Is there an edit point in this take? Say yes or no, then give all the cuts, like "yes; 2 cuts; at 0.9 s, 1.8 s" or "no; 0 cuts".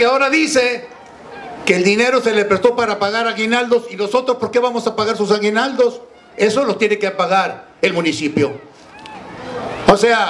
no; 0 cuts